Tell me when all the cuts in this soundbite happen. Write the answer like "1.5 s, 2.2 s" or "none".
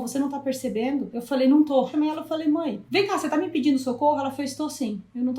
1.1 s, 1.9 s, 2.8 s